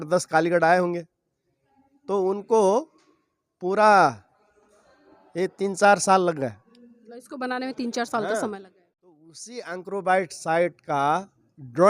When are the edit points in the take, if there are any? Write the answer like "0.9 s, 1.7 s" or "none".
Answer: 9.2 s